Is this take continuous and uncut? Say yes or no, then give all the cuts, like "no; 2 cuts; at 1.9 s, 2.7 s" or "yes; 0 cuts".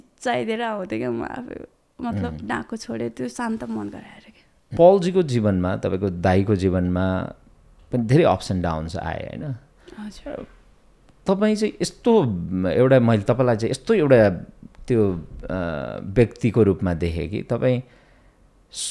no; 1 cut; at 4.7 s